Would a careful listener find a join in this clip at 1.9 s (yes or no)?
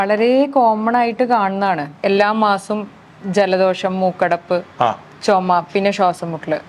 yes